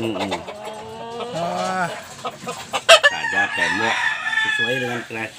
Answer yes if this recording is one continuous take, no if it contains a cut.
no